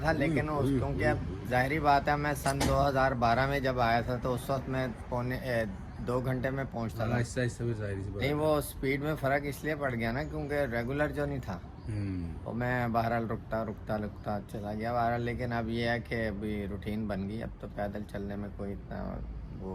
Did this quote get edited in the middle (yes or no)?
no